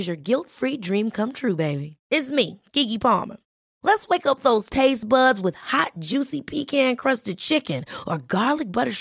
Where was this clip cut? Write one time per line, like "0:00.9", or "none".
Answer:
none